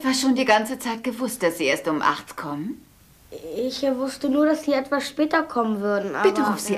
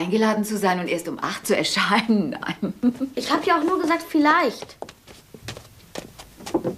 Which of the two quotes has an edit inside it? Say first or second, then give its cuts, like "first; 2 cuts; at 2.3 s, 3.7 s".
second; 1 cut; at 2.0 s